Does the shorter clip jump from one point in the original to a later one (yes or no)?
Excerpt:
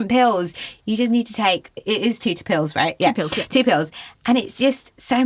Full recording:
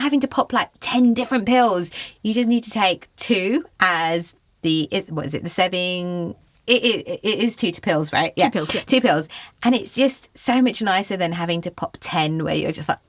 yes